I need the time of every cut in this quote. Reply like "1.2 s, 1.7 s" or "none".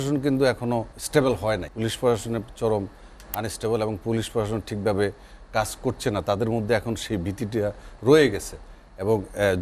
1.0 s, 1.7 s